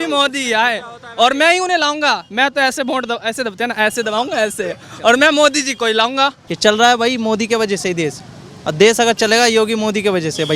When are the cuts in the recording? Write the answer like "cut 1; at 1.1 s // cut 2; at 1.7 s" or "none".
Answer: cut 1; at 6.4 s